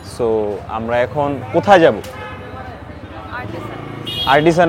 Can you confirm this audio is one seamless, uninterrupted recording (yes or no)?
yes